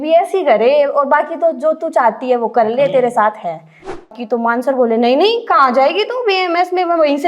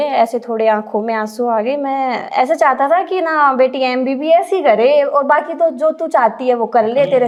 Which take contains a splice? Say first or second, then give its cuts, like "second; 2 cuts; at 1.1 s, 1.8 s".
first; 1 cut; at 4.1 s